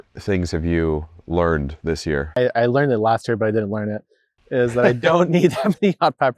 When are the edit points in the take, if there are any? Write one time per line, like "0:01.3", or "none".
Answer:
0:02.4